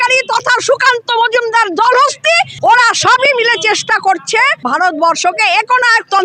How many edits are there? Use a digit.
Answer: 2